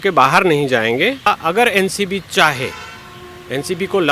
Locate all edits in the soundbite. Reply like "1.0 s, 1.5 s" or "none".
1.3 s